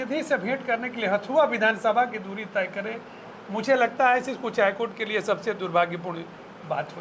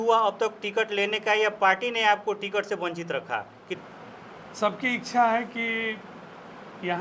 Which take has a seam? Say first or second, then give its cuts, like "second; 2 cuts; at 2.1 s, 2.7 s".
second; 1 cut; at 3.7 s